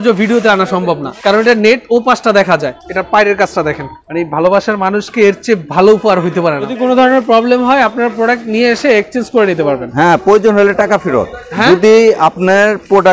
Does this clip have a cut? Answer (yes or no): yes